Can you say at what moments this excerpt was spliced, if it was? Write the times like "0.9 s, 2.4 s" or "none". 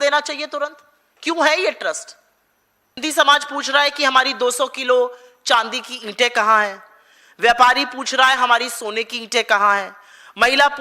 3.0 s